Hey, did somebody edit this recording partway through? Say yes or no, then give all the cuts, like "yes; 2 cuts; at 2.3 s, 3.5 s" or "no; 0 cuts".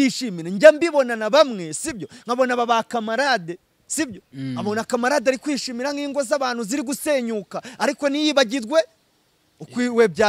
no; 0 cuts